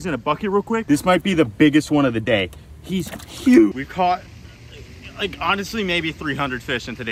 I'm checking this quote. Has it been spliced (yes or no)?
yes